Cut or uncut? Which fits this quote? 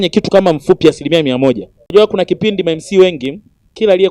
cut